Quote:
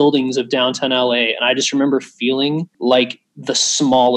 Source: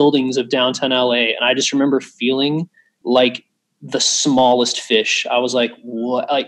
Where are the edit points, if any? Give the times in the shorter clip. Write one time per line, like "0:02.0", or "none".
0:02.7
0:03.3